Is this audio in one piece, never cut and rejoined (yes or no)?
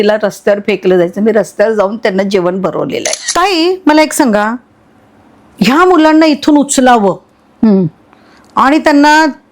no